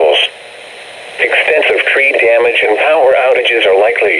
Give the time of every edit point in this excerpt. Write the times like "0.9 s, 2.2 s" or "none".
none